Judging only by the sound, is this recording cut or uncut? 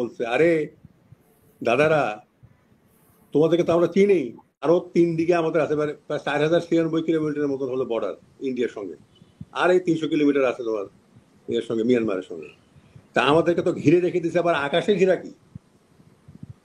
cut